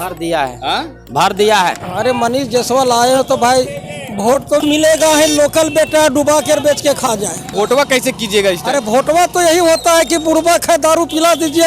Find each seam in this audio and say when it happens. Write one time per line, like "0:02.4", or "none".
0:01.8
0:07.5